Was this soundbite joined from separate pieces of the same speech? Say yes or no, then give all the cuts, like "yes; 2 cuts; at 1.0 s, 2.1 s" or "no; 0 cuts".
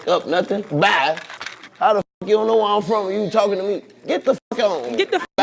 no; 0 cuts